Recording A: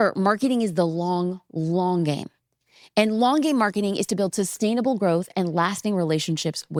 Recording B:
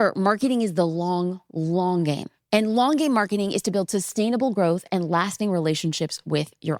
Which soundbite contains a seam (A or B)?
B